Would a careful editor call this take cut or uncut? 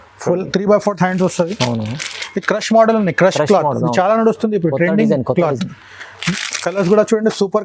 uncut